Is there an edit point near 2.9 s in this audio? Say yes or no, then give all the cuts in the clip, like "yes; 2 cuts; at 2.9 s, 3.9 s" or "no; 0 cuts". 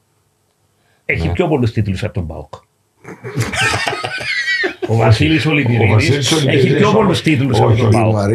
no; 0 cuts